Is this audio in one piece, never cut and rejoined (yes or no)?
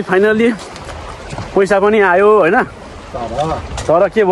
yes